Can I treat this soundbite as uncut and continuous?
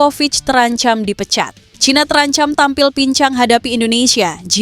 no; 1 cut; at 1.6 s

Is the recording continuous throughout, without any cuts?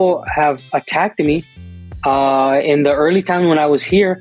yes; 0 cuts

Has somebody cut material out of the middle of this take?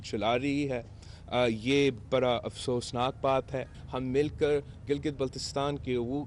yes; 1 cut; at 3.8 s

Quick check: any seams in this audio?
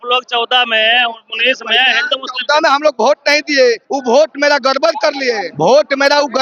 yes; 2 cuts; at 3.9 s, 5.5 s

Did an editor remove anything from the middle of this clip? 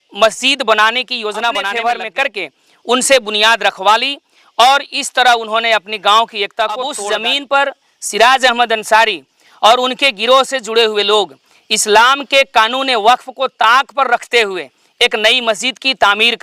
yes; 2 cuts; at 1.6 s, 7.0 s

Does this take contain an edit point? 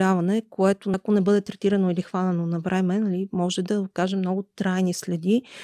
yes; 1 cut; at 0.9 s

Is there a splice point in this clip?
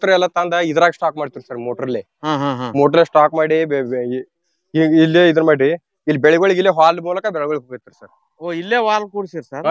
no; 0 cuts

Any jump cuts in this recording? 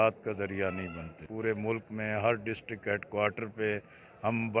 yes; 1 cut; at 1.2 s

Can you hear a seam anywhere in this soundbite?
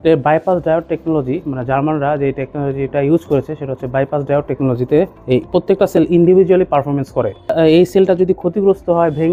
yes; 1 cut; at 7.5 s

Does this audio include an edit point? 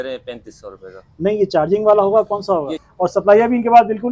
yes; 1 cut; at 2.8 s

